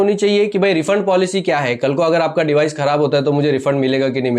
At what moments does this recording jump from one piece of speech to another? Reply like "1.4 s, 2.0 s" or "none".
none